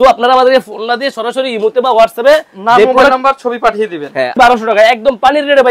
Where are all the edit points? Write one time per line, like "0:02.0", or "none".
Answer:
0:04.4